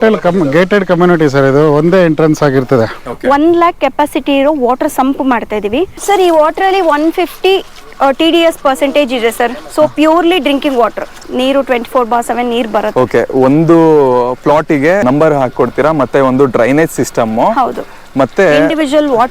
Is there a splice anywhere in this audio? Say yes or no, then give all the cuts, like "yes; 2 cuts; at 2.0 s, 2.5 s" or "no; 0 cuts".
yes; 3 cuts; at 3.0 s, 5.9 s, 11.2 s